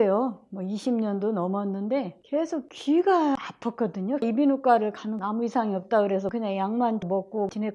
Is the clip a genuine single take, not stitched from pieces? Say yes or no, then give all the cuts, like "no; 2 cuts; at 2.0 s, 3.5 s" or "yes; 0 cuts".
yes; 0 cuts